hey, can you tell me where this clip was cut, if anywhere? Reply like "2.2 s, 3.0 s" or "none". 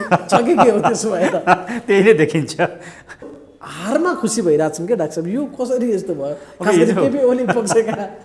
3.3 s